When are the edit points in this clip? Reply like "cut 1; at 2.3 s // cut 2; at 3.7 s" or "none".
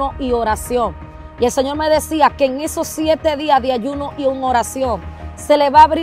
none